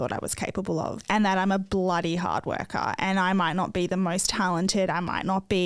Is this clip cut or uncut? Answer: cut